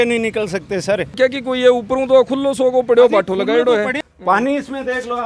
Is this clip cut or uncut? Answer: cut